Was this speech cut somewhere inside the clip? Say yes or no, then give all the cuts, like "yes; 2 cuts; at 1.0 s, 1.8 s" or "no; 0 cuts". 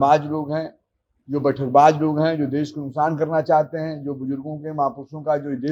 no; 0 cuts